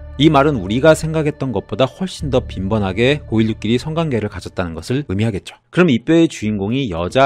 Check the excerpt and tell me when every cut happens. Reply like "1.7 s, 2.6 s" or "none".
5.6 s